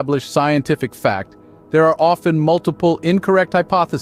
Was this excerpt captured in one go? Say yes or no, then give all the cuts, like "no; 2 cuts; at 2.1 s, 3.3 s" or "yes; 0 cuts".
yes; 0 cuts